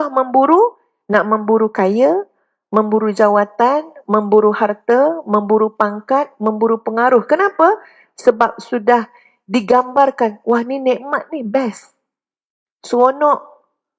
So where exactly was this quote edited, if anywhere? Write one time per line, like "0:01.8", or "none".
none